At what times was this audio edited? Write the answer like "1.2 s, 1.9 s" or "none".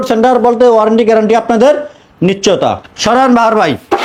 none